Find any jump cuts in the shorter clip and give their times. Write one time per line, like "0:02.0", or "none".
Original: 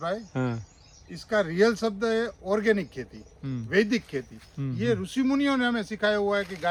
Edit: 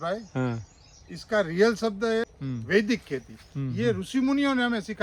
0:02.3